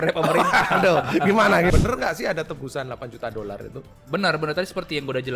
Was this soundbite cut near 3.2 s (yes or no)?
no